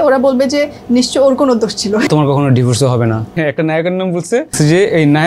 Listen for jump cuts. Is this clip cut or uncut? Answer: cut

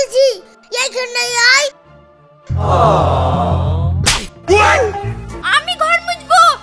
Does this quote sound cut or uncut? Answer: cut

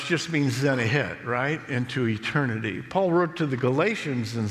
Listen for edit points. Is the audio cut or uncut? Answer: uncut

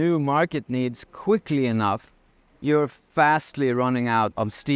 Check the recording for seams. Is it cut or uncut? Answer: uncut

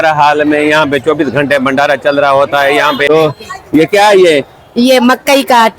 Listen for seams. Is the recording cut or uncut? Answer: cut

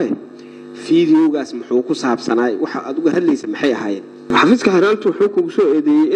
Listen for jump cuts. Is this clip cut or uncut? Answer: cut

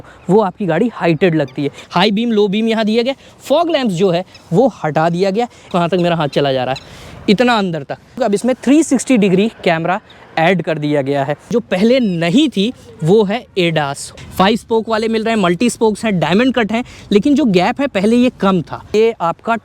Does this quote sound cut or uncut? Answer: cut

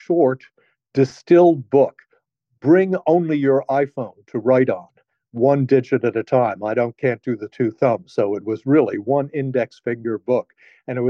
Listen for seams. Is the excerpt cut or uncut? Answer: uncut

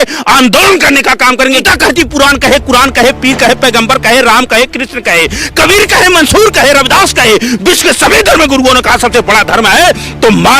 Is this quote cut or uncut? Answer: cut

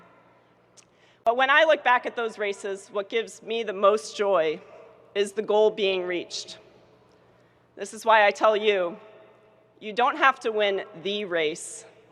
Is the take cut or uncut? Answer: cut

